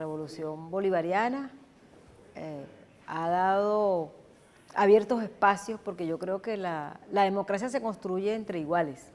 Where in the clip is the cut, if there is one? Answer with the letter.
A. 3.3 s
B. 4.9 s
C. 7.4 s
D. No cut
A